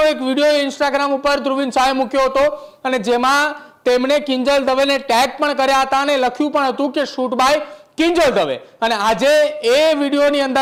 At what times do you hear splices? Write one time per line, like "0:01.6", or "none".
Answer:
none